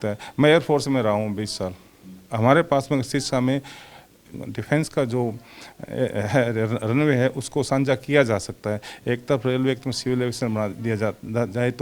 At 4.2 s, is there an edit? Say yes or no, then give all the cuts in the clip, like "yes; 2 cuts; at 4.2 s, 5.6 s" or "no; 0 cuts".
yes; 1 cut; at 4.2 s